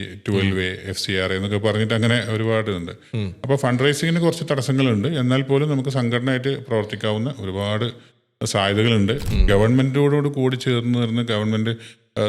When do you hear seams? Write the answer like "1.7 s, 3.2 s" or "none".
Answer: 9.2 s